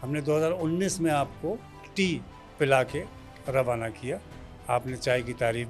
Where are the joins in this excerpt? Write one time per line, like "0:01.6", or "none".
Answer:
0:01.8